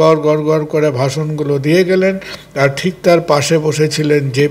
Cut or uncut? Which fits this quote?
uncut